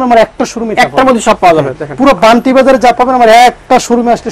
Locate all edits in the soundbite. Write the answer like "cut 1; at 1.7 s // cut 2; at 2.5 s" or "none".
none

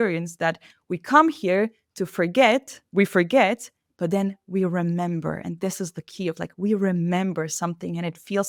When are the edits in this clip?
none

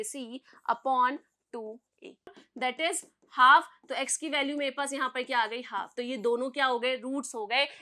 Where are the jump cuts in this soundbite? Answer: cut 1; at 2.4 s

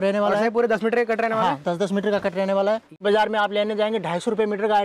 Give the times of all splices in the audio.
cut 1; at 3.0 s

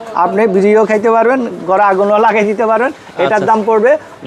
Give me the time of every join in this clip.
none

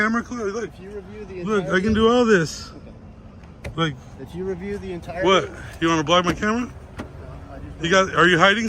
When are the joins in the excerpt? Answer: none

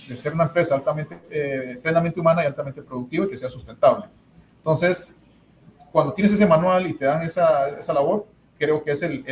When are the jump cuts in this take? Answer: none

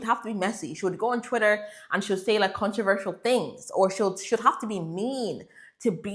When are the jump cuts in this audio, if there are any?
none

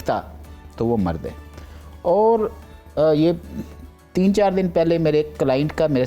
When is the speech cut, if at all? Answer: none

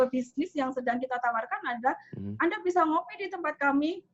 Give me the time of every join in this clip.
none

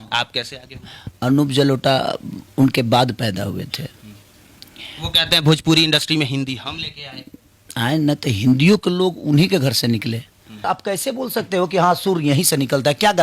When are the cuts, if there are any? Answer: cut 1; at 10.6 s

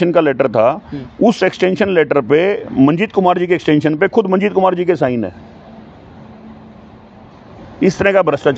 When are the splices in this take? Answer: none

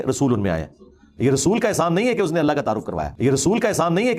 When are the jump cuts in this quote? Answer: none

